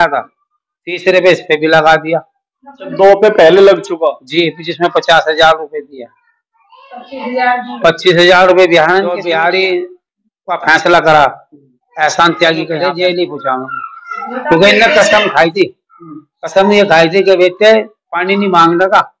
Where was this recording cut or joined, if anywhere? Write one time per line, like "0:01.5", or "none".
0:09.2
0:12.8